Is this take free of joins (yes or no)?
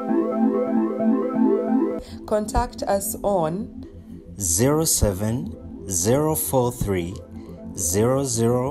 no